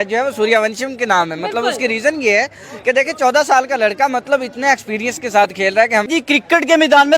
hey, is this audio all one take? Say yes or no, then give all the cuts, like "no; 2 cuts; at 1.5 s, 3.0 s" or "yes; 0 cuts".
no; 1 cut; at 6.1 s